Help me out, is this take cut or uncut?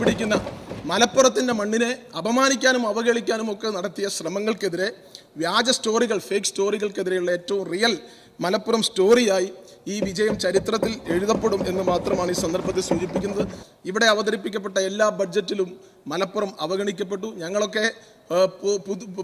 cut